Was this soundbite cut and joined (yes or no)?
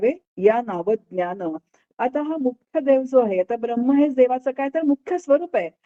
no